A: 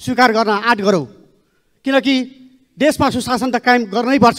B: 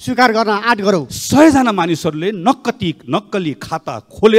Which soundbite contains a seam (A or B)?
B